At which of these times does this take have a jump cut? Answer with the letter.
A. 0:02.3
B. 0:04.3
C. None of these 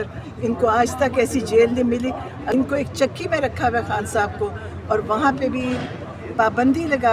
A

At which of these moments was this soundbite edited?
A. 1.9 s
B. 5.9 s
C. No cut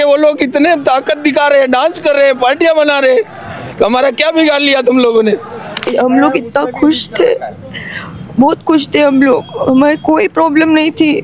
B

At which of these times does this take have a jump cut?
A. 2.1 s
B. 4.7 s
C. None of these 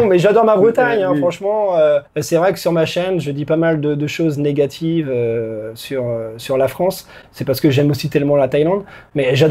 A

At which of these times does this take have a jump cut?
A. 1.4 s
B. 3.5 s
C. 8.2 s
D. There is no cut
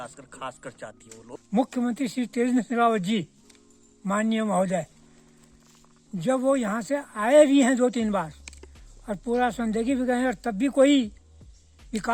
A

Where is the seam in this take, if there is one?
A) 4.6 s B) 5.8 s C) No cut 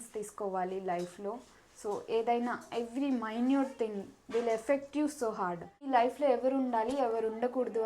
B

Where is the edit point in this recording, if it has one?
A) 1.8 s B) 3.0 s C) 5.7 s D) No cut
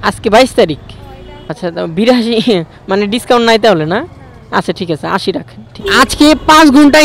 C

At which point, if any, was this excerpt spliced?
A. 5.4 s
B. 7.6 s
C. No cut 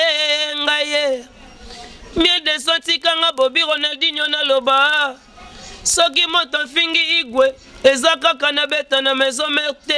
C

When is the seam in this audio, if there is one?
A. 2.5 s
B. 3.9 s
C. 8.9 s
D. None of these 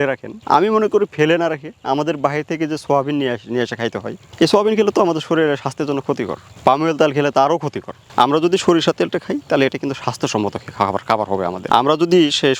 D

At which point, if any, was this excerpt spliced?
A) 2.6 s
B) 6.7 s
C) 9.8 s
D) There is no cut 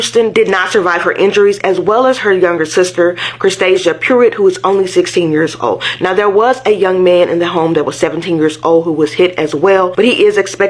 D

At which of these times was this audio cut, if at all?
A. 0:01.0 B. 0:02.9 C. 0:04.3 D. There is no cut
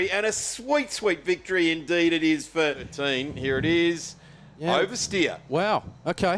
B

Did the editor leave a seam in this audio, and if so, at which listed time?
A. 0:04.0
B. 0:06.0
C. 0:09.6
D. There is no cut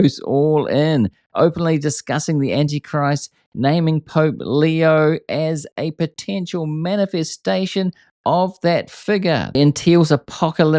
C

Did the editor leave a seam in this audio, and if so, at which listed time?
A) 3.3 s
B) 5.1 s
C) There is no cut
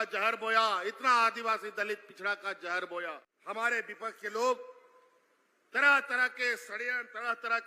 A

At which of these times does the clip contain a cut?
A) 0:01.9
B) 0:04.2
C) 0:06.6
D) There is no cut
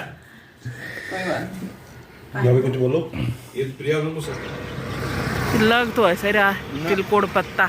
B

